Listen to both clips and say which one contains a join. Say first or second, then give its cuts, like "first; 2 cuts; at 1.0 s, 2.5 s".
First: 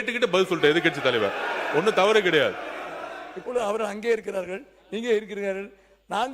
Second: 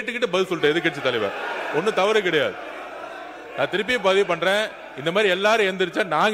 first; 1 cut; at 3.2 s